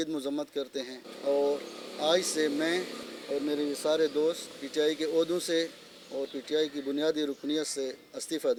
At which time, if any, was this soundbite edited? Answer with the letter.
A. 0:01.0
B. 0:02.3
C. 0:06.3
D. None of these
D